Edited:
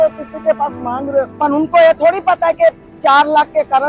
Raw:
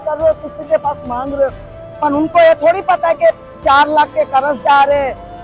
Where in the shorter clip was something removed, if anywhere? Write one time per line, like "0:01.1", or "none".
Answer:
0:01.3